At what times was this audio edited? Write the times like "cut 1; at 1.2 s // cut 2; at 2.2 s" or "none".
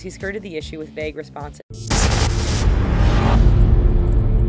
none